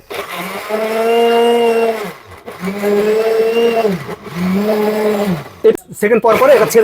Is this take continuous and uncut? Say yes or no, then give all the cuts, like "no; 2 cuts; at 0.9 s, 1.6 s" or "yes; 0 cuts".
no; 1 cut; at 5.7 s